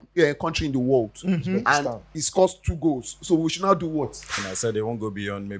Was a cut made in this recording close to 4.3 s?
yes; 1 cut; at 4.3 s

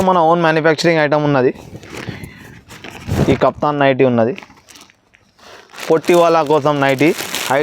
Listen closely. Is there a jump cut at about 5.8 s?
yes; 1 cut; at 5.8 s

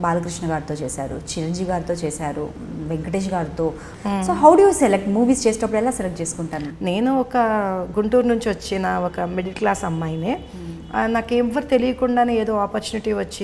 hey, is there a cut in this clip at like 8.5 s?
no; 2 cuts; at 3.9 s, 6.6 s

